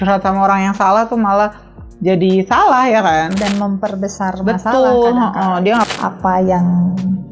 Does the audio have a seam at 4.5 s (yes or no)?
no